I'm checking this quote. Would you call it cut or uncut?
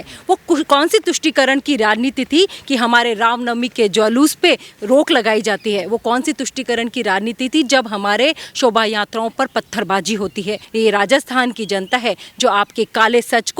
cut